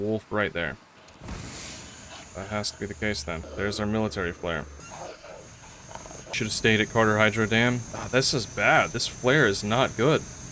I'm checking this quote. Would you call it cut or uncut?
cut